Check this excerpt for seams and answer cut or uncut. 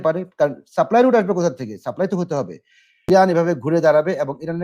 cut